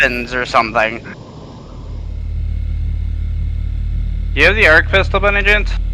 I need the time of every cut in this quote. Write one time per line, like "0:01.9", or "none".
0:02.0